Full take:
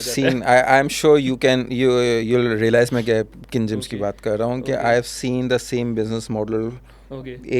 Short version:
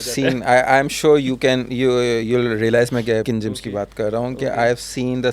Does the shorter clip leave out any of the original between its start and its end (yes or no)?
yes